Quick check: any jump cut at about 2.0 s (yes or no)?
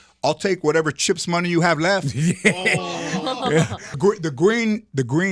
no